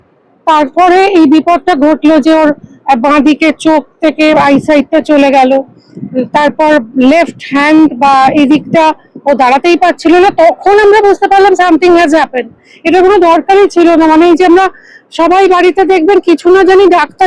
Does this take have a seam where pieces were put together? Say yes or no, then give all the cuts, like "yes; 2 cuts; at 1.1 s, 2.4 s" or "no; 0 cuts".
no; 0 cuts